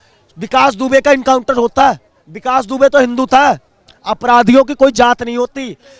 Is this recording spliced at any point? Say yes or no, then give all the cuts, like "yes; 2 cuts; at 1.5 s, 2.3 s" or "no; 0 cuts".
no; 0 cuts